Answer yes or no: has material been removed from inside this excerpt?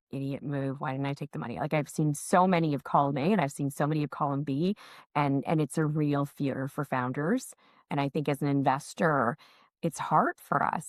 no